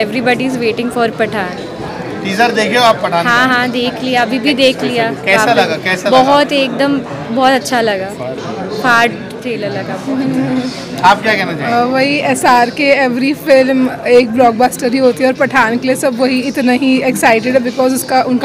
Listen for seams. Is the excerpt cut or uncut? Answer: uncut